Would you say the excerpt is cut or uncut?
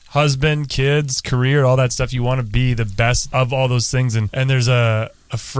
cut